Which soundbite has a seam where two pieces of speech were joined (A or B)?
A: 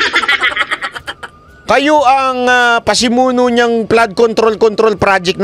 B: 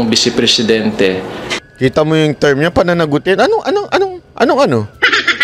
B